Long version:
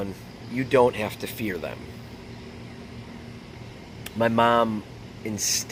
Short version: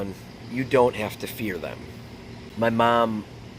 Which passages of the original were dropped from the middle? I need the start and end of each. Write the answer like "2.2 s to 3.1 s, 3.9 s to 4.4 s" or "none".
2.4 s to 4.0 s